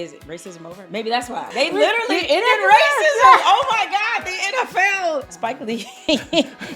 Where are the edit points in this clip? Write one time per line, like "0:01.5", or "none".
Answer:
0:01.5
0:05.2